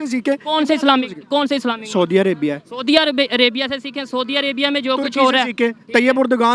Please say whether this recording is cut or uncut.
uncut